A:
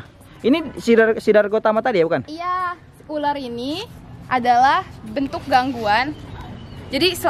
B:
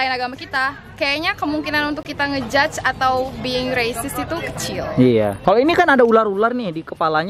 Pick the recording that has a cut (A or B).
B